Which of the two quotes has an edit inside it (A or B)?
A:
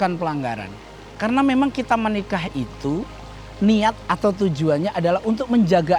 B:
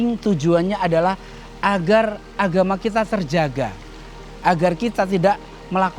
A